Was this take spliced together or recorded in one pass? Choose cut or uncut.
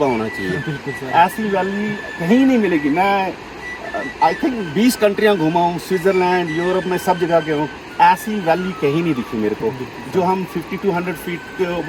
uncut